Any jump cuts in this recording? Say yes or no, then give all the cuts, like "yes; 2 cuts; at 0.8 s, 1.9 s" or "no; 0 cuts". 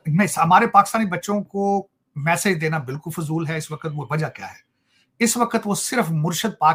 no; 0 cuts